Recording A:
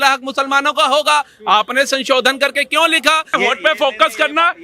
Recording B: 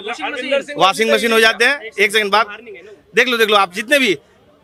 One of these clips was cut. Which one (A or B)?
A